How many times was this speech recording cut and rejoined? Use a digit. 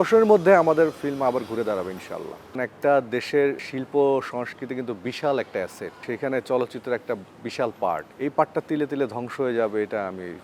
2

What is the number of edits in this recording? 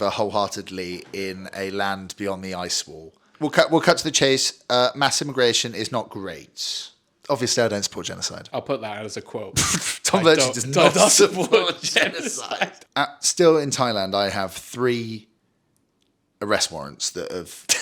3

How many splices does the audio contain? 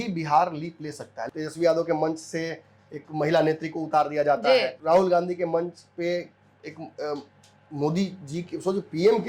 2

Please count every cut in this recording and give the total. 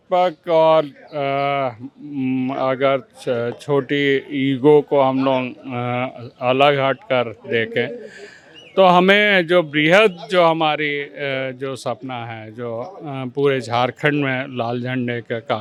0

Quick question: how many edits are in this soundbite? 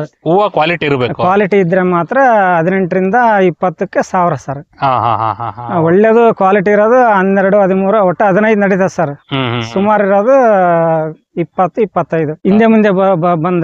1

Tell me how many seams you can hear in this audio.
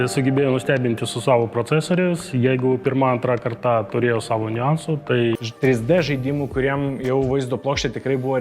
1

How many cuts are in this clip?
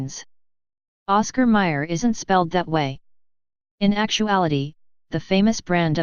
1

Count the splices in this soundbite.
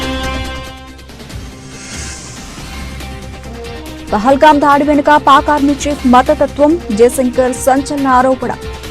1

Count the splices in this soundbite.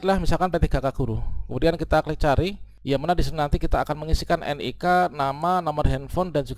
1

